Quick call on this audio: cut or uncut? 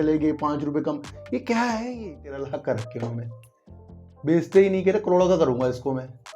cut